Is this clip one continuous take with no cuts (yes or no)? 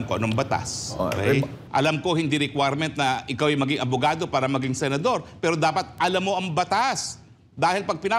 no